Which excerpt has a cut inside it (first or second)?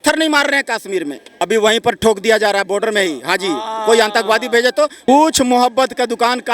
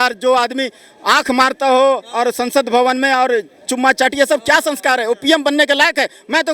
first